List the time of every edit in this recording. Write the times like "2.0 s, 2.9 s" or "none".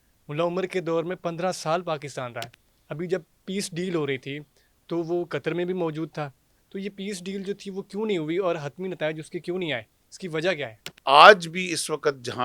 10.8 s